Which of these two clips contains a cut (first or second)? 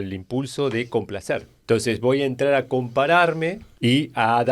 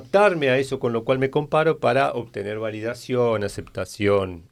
first